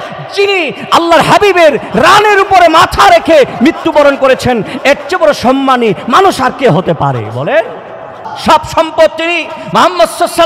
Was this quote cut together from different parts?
yes; 1 cut; at 8.2 s

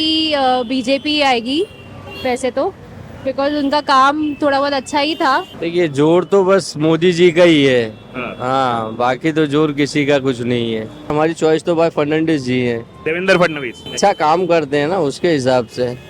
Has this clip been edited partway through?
yes; 3 cuts; at 5.5 s, 11.1 s, 13.9 s

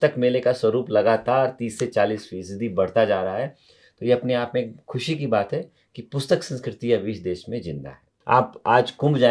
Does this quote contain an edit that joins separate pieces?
yes; 1 cut; at 8.1 s

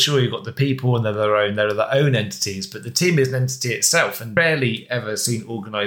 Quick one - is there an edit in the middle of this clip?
yes; 1 cut; at 4.3 s

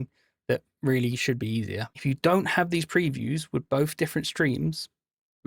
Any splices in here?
yes; 1 cut; at 1.9 s

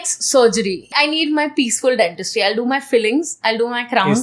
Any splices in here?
yes; 1 cut; at 0.9 s

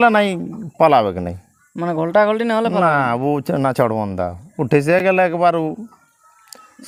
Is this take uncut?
yes; 0 cuts

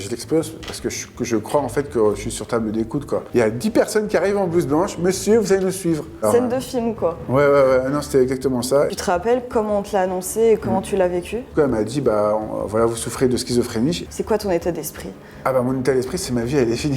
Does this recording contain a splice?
yes; 5 cuts; at 3.2 s, 6.2 s, 8.9 s, 11.5 s, 14.0 s

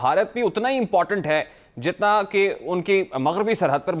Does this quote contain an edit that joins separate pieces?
no; 0 cuts

